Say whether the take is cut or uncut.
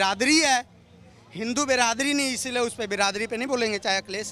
uncut